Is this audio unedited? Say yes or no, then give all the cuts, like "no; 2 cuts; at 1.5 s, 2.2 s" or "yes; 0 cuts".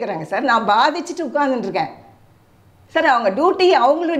yes; 0 cuts